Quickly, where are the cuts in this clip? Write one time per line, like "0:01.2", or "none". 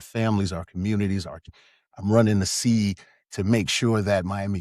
0:01.5